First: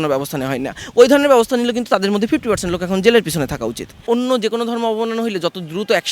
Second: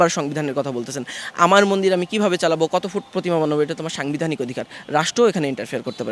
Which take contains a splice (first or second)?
first